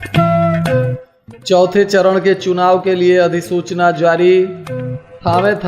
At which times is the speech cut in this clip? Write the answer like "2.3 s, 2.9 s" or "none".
1.0 s